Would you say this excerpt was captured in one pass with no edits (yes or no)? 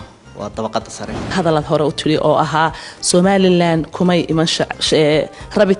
no